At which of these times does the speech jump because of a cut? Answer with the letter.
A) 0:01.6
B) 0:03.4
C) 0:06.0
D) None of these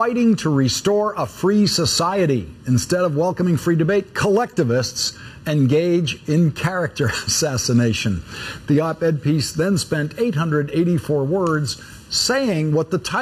B